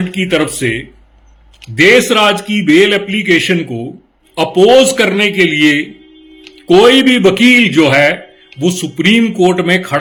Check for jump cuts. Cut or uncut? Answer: uncut